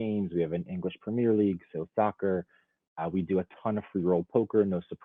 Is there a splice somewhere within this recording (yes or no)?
no